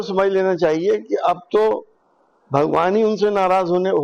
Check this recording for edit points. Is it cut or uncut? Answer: cut